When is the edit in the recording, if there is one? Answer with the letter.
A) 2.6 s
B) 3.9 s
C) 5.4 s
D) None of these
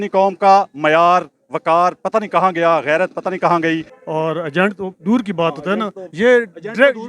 B